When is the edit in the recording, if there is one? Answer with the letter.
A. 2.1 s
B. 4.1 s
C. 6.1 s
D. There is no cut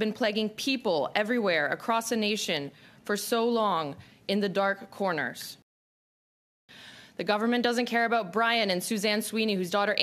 C